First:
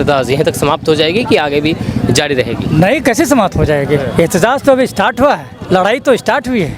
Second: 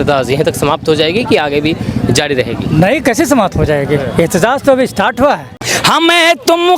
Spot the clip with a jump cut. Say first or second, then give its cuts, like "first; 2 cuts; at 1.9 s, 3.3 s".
second; 1 cut; at 5.5 s